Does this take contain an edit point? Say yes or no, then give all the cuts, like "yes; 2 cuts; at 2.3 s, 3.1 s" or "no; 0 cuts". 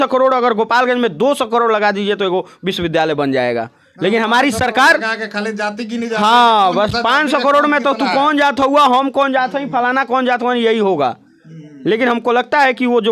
no; 0 cuts